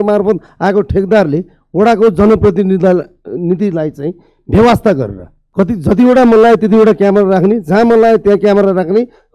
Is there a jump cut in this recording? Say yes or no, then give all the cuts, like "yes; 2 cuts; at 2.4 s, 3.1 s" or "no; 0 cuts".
yes; 1 cut; at 5.4 s